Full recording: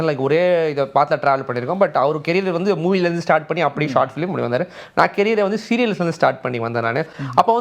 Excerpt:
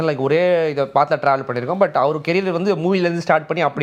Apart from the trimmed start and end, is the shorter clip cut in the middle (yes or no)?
no